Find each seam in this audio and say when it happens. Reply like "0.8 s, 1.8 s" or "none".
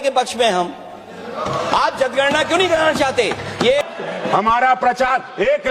3.8 s

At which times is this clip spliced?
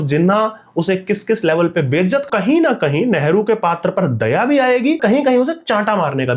2.2 s, 5.0 s

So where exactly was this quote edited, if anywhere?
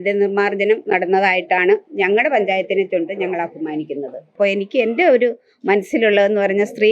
4.3 s

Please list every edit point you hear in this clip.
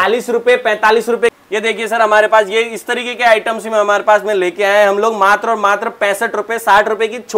1.3 s

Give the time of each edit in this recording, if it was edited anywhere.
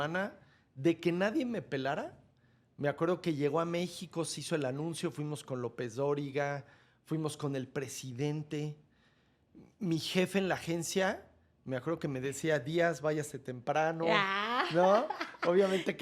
none

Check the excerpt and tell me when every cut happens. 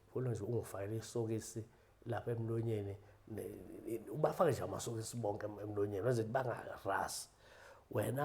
none

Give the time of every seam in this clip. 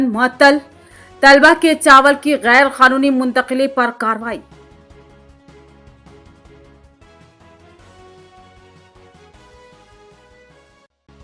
none

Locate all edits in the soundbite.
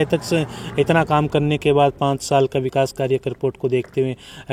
none

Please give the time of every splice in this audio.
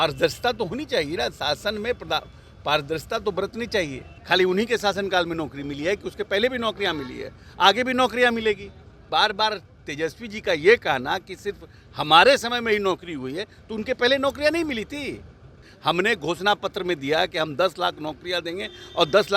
4.1 s, 9.1 s, 15.7 s

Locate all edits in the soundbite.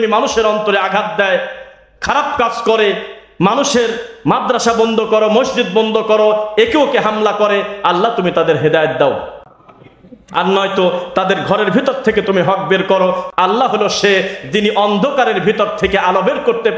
13.3 s

